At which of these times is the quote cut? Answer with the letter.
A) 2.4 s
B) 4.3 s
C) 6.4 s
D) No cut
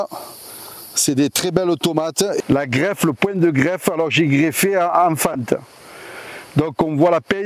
A